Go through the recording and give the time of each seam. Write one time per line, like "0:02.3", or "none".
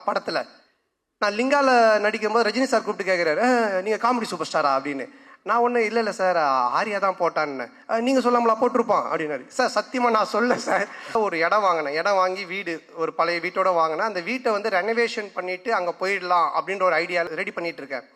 0:11.1
0:17.3